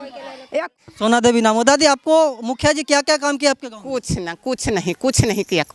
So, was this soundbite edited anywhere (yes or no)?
yes